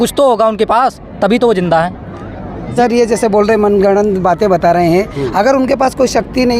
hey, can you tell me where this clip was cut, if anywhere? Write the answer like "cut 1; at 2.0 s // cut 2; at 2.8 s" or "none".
cut 1; at 2.7 s